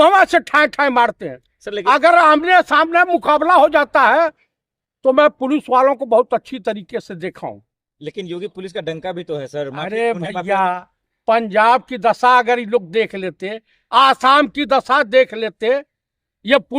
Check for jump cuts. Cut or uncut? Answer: uncut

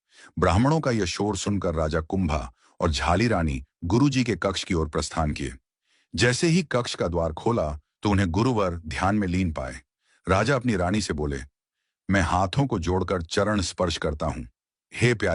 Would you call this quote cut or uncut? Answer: uncut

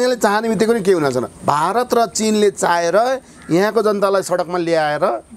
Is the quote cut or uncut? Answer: cut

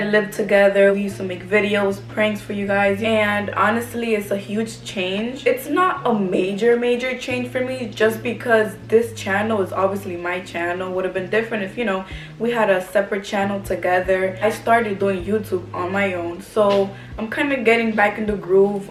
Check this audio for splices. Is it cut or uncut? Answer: uncut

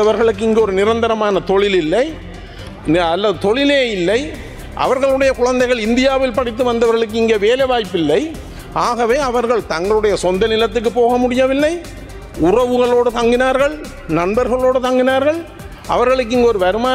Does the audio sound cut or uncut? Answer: uncut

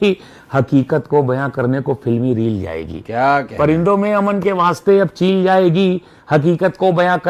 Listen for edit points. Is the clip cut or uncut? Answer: uncut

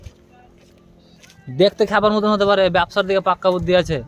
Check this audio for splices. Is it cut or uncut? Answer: uncut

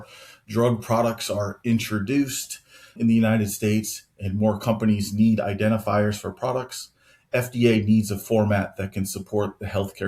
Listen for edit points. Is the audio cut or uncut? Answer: uncut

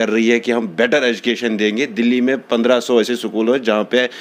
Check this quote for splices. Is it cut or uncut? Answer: uncut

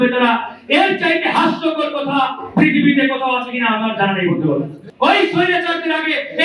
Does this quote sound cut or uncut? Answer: cut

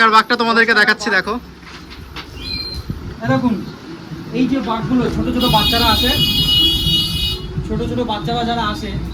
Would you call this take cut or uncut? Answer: uncut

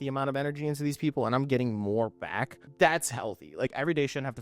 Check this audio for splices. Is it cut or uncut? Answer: cut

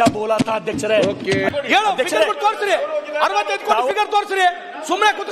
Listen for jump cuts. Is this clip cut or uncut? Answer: cut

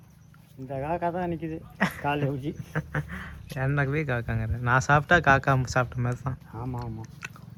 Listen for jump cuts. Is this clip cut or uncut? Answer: uncut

